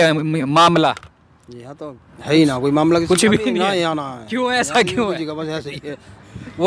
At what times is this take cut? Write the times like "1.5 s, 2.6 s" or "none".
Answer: none